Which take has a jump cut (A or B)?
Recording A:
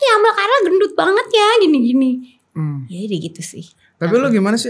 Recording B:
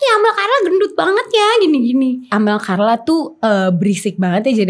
B